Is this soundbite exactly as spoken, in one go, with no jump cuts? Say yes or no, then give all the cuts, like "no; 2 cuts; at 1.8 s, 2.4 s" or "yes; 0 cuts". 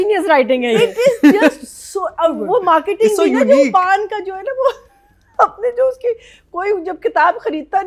yes; 0 cuts